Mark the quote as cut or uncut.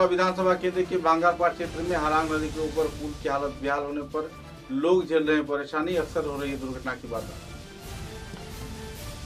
uncut